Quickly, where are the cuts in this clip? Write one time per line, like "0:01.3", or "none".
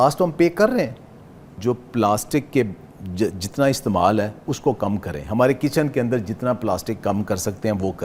0:01.5